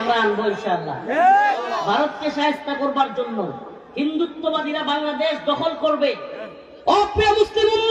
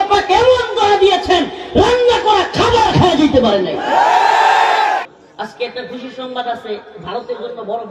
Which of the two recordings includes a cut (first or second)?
second